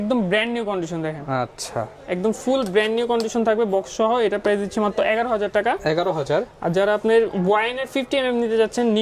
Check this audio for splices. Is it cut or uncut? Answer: uncut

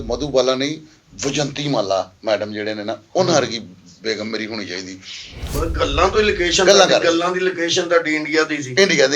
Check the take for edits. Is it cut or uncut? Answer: cut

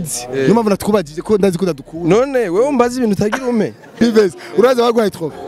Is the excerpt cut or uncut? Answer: cut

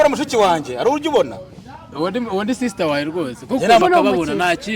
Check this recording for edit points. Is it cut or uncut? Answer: cut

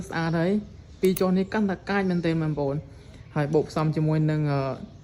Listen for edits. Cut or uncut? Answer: cut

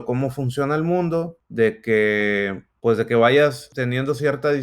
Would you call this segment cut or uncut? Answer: cut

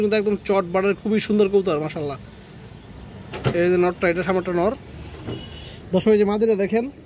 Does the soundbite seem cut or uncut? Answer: uncut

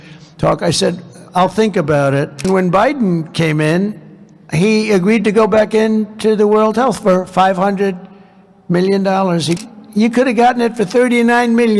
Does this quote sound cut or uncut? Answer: cut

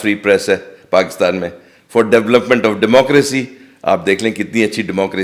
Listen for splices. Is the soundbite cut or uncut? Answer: uncut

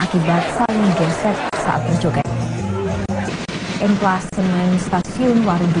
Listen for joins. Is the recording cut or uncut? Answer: uncut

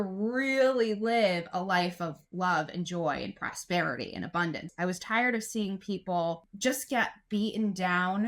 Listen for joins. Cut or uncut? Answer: cut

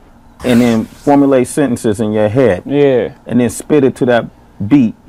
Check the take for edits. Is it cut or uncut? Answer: uncut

